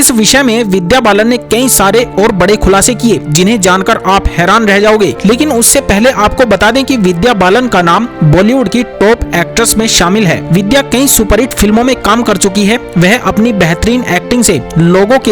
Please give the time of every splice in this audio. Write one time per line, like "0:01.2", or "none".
none